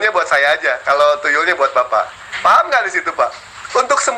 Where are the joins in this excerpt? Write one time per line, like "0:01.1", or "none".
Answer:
none